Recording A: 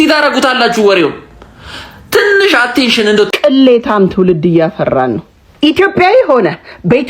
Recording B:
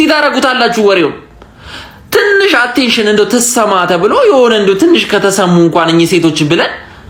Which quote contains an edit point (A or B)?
A